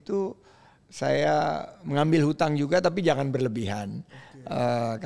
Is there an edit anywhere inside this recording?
no; 0 cuts

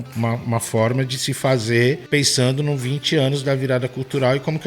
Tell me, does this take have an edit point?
yes; 1 cut; at 2.0 s

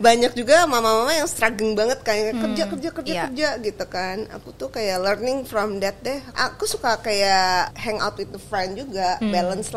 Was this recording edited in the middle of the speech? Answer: yes; 2 cuts; at 6.3 s, 7.7 s

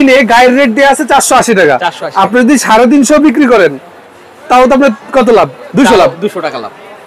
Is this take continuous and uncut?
yes; 0 cuts

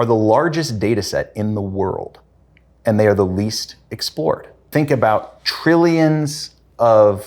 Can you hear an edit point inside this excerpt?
yes; 1 cut; at 4.7 s

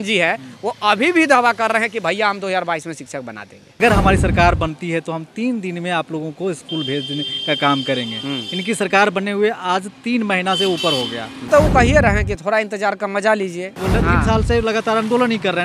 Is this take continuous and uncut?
no; 3 cuts; at 3.7 s, 11.4 s, 13.8 s

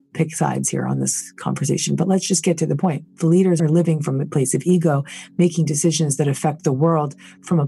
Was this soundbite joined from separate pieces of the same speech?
yes; 1 cut; at 3.6 s

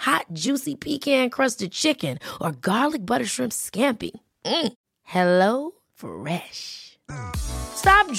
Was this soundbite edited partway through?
no; 0 cuts

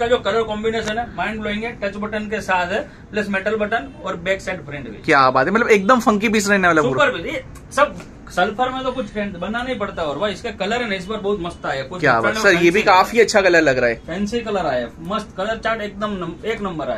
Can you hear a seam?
no; 0 cuts

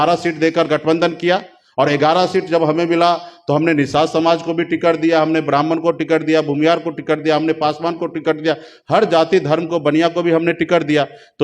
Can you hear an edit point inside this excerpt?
no; 0 cuts

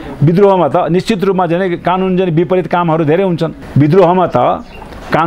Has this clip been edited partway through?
yes; 1 cut; at 3.6 s

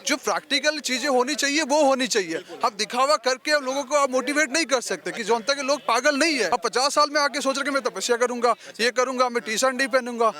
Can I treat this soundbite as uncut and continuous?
no; 1 cut; at 6.5 s

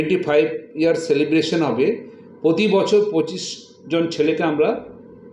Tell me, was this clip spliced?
no; 0 cuts

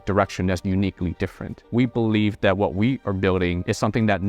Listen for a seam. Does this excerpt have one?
yes; 1 cut; at 1.6 s

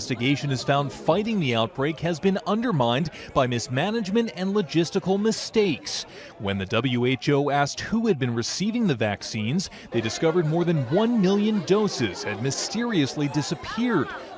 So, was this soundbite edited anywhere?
yes; 1 cut; at 10.3 s

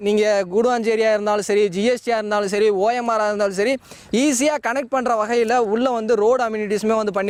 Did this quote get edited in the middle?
no; 0 cuts

